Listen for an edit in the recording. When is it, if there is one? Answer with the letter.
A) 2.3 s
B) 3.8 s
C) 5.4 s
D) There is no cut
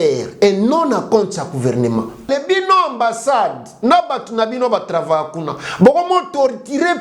A